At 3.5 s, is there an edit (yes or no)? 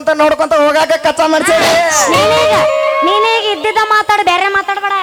no